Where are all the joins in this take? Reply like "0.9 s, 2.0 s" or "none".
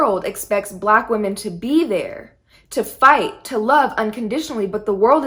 none